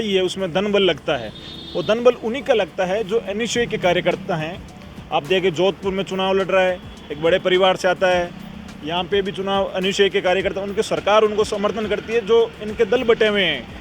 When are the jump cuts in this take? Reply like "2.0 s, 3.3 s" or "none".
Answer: none